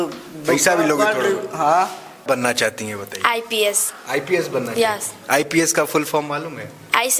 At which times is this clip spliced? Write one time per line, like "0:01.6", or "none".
0:02.2